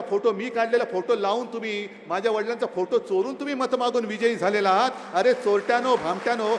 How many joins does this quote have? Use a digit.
0